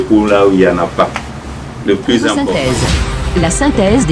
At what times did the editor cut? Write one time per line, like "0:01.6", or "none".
0:02.4